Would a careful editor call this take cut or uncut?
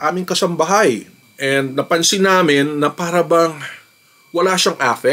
uncut